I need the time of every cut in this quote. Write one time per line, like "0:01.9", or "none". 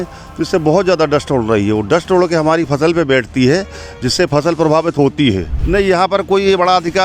0:05.6

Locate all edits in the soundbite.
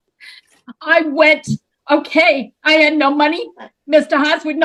none

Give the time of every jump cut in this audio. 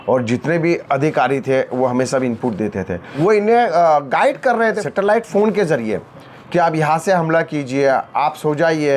0:03.0
0:04.8

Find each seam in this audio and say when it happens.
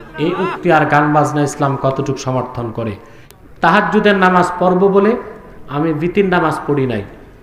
0:02.8

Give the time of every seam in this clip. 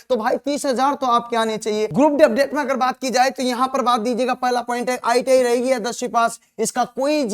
0:01.9

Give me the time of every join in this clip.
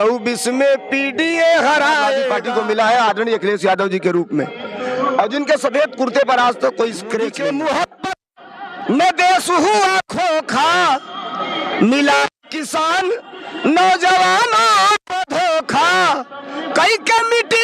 0:02.4
0:07.3

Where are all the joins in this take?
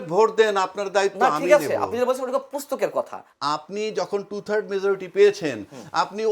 0:03.2

